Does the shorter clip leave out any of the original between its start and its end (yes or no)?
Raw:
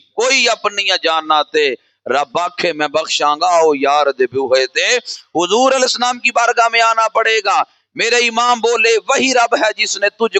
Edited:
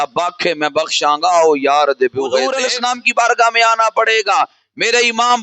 yes